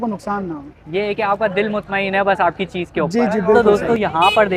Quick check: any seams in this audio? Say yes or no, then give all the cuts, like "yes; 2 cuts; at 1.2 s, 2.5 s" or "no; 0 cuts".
yes; 1 cut; at 3.6 s